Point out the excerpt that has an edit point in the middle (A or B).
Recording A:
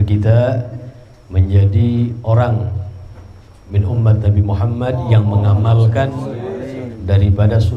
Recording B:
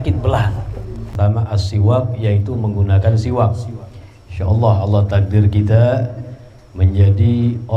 B